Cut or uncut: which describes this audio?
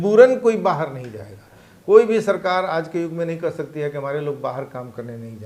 uncut